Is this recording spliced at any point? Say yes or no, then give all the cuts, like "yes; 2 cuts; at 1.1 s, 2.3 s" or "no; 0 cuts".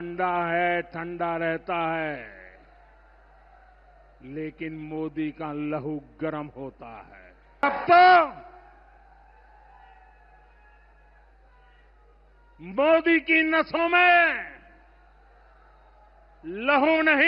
yes; 1 cut; at 7.6 s